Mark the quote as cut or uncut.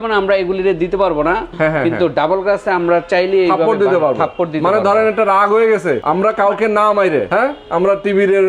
cut